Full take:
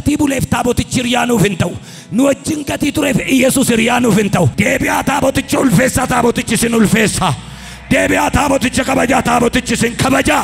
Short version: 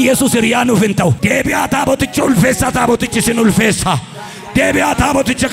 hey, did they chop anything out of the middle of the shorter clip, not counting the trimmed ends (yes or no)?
no